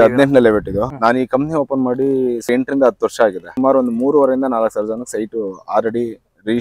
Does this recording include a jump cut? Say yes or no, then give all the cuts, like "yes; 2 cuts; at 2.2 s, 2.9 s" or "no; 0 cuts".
yes; 3 cuts; at 0.9 s, 2.5 s, 3.5 s